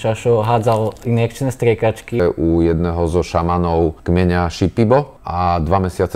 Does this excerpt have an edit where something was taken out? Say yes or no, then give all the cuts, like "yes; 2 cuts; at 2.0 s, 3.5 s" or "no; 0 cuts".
yes; 3 cuts; at 2.2 s, 4.0 s, 5.2 s